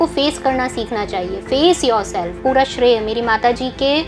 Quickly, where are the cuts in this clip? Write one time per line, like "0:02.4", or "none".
0:02.3